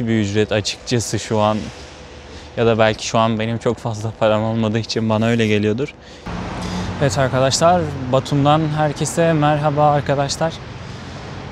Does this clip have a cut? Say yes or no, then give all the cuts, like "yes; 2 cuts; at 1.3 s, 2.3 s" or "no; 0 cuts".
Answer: yes; 1 cut; at 6.4 s